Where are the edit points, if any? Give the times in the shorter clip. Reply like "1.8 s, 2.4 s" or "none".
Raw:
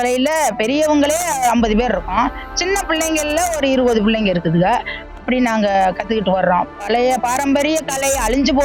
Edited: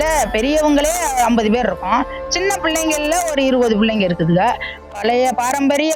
4.9 s